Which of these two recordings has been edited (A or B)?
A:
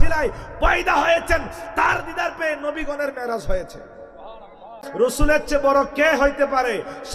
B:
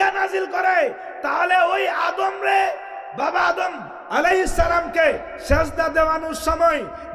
A